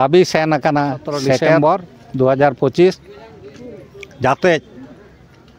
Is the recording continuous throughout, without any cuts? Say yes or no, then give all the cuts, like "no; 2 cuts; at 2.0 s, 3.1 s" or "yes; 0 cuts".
no; 1 cut; at 1.6 s